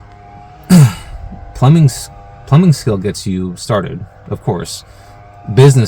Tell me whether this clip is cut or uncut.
uncut